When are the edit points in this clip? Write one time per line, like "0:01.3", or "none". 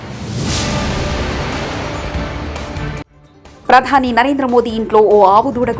0:03.1